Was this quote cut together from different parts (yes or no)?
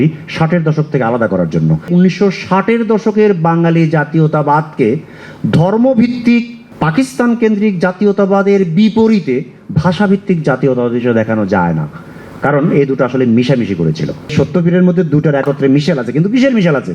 yes